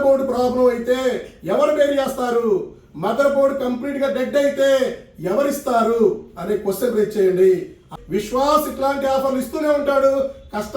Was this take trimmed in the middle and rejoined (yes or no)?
yes